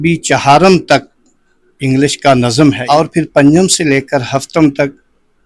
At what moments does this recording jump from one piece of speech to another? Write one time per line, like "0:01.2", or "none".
0:02.8